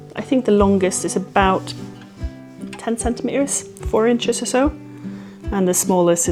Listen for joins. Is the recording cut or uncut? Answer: uncut